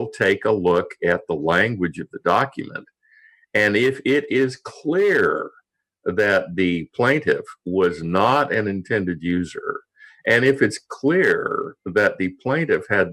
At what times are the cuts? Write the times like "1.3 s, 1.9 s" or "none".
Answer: none

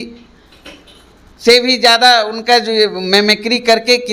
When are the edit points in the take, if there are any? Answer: none

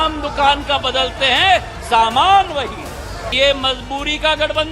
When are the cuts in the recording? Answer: 3.2 s

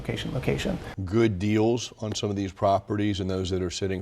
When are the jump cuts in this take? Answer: 0.9 s

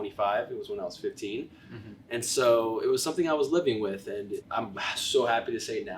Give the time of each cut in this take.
4.4 s

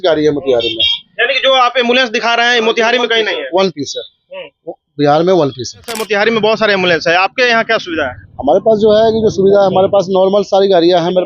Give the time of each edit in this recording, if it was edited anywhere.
5.9 s

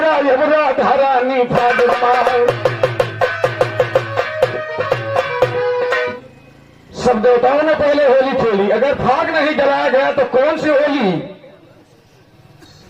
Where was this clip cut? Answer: 6.1 s

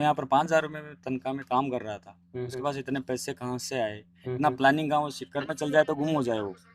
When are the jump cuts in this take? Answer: none

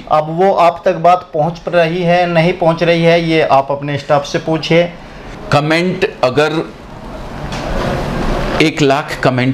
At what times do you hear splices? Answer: none

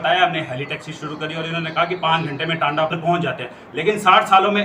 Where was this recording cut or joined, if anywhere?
2.9 s

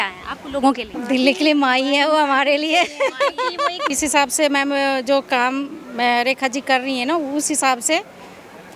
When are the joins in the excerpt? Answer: 0.9 s, 3.9 s

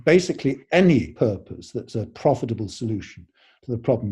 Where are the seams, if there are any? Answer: 1.1 s

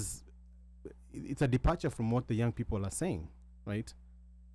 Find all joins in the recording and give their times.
none

